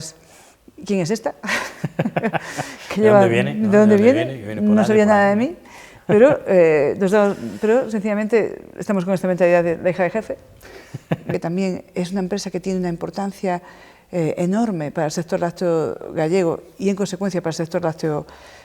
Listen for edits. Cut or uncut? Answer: cut